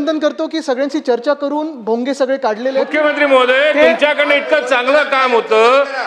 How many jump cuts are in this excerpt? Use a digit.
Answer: 1